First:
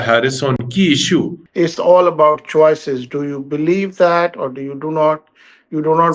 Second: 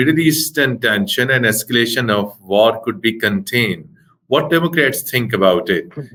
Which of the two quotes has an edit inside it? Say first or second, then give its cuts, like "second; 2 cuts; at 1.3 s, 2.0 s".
first; 1 cut; at 1.4 s